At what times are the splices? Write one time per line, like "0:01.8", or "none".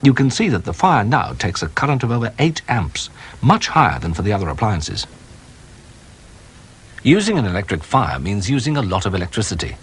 0:04.2